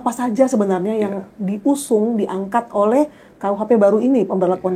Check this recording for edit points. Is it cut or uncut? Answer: uncut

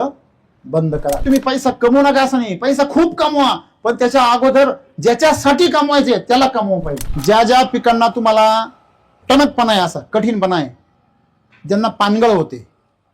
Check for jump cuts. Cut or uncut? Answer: cut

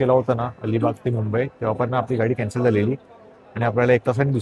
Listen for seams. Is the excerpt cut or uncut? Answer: uncut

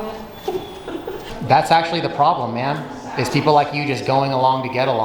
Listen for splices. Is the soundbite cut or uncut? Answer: cut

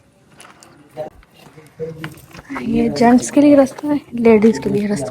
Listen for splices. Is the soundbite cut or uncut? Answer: cut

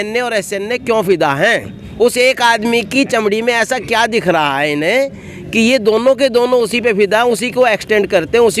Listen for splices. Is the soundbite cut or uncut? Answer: uncut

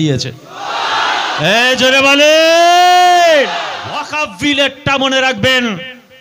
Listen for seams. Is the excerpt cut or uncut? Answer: cut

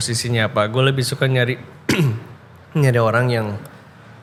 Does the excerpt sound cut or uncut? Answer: uncut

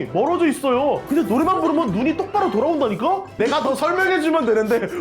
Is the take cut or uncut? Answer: cut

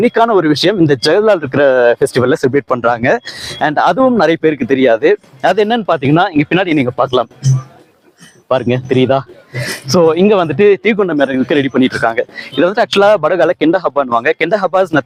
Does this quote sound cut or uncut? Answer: uncut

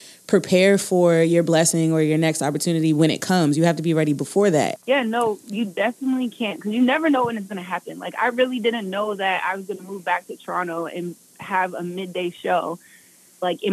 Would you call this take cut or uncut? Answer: cut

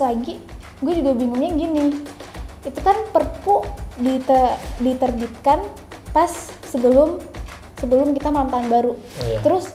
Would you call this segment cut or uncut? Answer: uncut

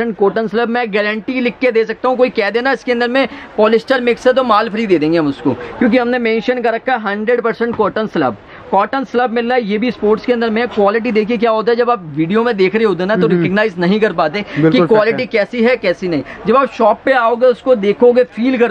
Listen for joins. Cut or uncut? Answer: uncut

